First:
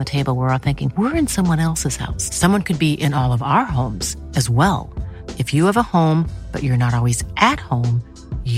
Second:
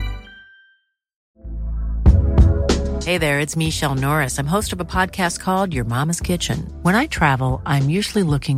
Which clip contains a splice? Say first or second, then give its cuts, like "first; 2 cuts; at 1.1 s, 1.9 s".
second; 1 cut; at 1.2 s